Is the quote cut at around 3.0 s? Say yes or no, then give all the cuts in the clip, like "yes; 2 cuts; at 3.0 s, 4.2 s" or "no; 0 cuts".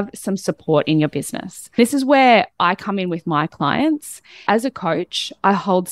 no; 2 cuts; at 1.8 s, 4.4 s